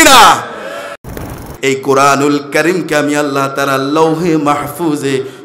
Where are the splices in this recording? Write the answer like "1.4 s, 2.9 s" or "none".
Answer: 1.2 s